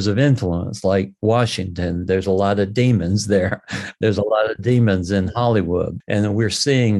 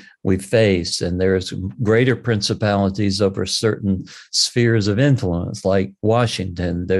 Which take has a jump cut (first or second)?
first